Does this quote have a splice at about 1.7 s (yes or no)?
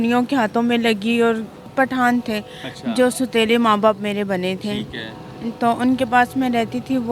yes